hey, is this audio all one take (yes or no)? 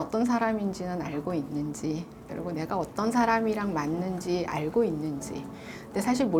yes